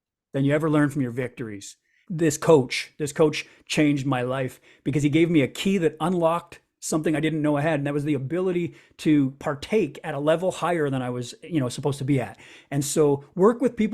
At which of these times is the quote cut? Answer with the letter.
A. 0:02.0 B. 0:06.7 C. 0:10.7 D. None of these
A